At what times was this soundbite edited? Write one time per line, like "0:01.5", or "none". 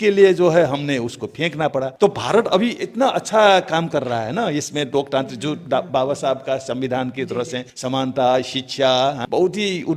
0:01.9
0:07.7
0:09.2

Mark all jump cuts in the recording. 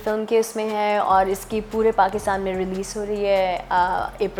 none

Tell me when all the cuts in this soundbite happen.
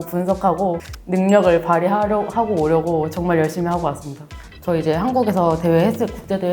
0:04.3

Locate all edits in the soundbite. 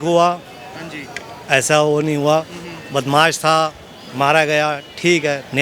none

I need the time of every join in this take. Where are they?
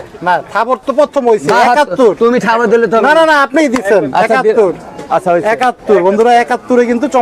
none

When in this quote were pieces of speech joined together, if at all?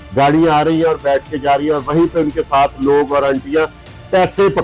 none

